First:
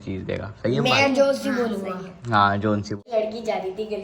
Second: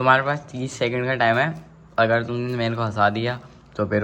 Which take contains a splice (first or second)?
first